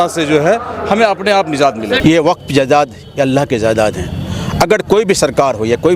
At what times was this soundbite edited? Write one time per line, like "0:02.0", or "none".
0:02.0